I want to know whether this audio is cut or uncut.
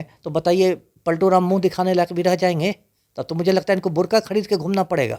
uncut